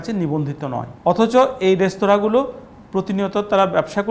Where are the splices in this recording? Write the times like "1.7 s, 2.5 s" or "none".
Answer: 0.9 s